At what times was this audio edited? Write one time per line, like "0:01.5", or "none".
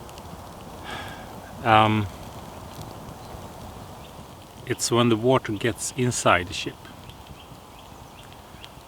0:04.2